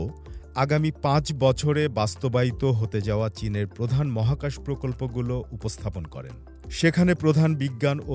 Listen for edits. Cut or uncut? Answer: uncut